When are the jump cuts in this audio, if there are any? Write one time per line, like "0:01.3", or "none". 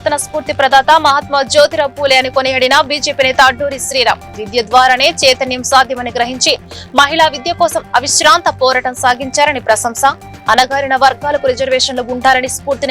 none